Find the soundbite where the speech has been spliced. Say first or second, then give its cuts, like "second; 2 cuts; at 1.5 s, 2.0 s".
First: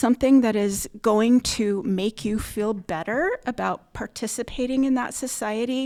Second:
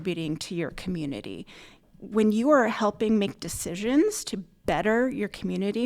second; 1 cut; at 1.9 s